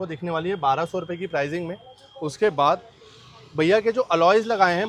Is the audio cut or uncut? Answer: uncut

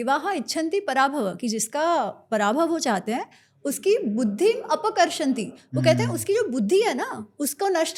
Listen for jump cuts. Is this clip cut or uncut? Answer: uncut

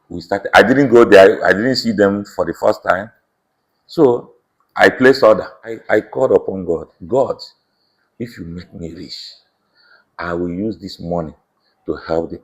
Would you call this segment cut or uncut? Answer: cut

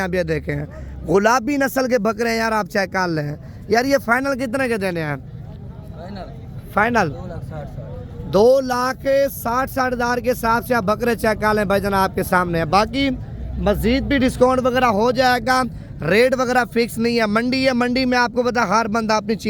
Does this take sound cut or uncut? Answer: uncut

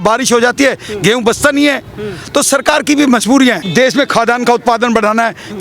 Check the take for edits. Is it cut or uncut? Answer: cut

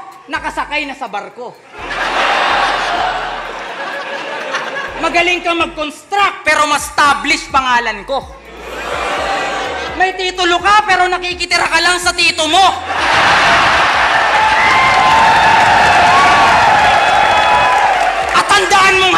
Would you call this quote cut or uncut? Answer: uncut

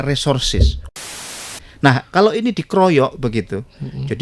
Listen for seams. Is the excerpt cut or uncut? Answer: cut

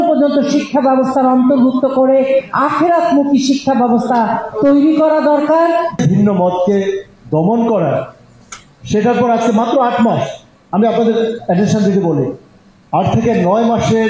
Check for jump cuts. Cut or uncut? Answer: cut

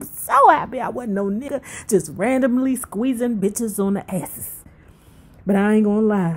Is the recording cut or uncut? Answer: cut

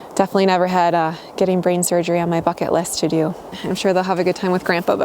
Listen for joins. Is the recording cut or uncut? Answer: cut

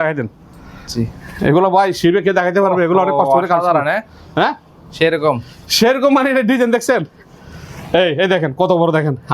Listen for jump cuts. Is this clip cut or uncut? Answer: uncut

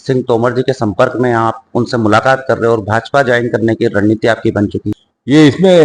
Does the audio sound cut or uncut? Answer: cut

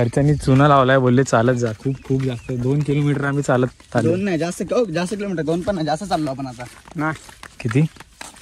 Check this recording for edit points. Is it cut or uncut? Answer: uncut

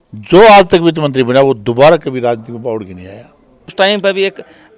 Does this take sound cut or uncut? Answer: cut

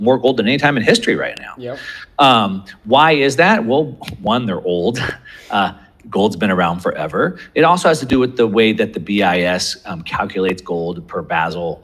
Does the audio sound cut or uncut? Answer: uncut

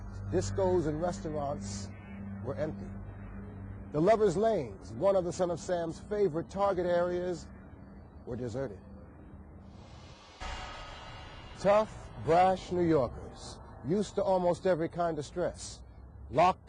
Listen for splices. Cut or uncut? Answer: uncut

